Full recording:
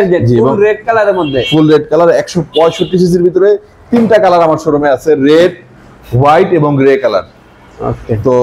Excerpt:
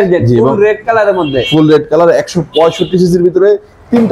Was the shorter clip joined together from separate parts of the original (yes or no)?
no